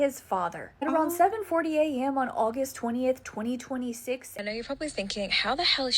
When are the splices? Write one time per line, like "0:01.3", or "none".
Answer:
0:04.3